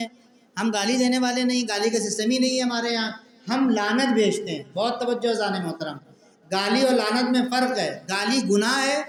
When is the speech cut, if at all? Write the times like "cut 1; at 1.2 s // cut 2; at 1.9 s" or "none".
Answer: none